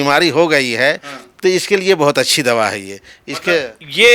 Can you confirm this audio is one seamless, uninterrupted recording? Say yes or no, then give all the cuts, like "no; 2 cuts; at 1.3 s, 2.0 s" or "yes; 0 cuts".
yes; 0 cuts